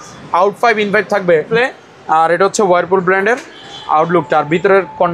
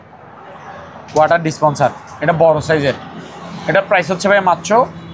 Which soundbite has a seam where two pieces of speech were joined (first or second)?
first